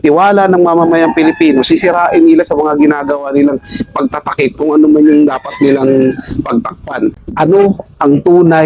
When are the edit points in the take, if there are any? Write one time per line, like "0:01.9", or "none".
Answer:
0:07.2